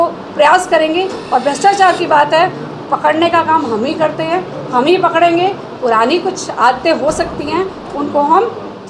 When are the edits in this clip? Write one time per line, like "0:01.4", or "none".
none